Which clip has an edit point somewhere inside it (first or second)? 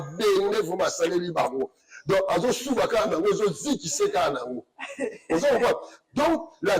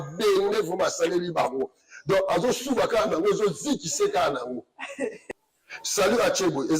second